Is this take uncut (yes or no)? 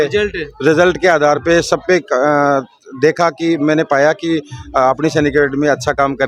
yes